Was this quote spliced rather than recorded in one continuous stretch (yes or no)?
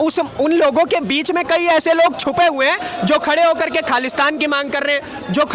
no